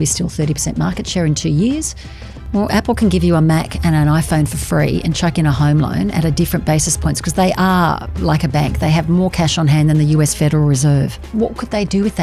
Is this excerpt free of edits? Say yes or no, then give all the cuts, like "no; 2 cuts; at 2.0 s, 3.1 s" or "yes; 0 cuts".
no; 2 cuts; at 2.3 s, 11.2 s